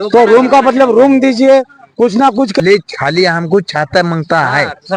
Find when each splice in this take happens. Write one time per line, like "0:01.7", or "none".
0:02.6

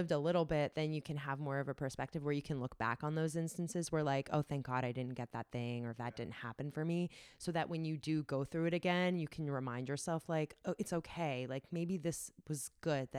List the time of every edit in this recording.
none

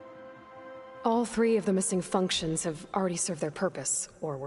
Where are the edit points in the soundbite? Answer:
0:01.0

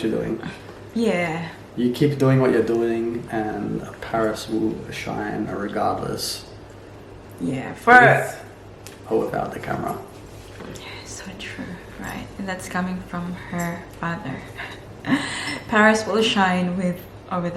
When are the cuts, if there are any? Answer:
none

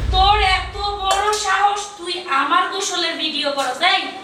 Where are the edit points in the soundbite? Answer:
none

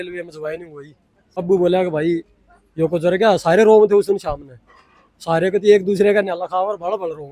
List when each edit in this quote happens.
0:01.4

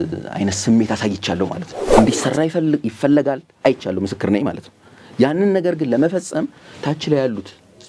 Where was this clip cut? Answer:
0:01.8

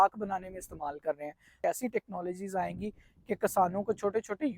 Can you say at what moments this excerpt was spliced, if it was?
0:01.6

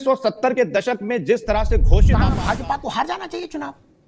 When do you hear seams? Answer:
0:02.1

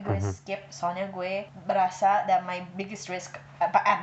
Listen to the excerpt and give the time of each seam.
0:01.5

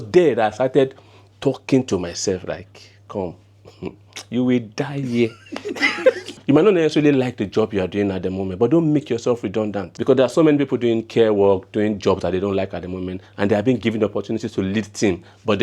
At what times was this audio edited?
0:06.3
0:09.9

